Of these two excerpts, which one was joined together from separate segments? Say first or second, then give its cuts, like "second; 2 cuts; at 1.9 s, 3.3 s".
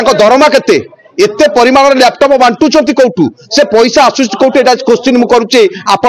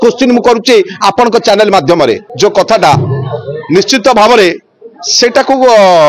second; 1 cut; at 2.3 s